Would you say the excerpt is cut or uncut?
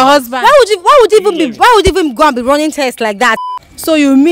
cut